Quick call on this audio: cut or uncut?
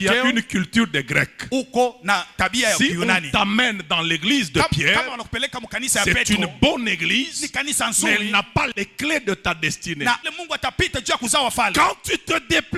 cut